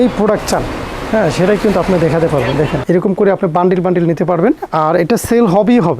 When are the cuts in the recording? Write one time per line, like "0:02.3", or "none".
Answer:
0:02.8